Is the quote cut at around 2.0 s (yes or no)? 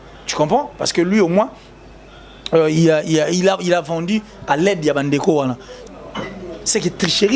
no